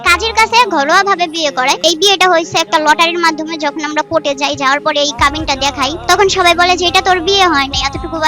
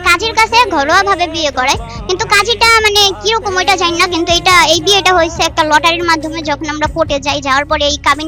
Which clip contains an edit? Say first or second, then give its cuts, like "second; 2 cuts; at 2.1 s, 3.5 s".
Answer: first; 2 cuts; at 1.8 s, 6.0 s